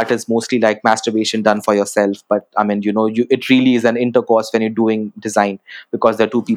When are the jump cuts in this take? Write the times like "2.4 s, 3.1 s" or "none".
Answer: none